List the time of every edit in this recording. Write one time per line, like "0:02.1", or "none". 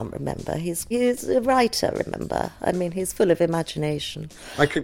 0:00.9